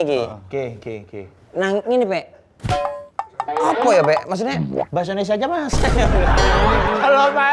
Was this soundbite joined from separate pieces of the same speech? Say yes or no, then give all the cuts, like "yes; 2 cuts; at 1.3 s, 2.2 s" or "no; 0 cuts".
no; 0 cuts